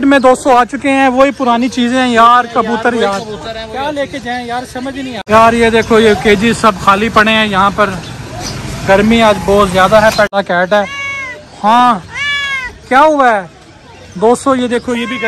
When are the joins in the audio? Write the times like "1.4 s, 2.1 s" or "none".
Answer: 5.3 s, 10.3 s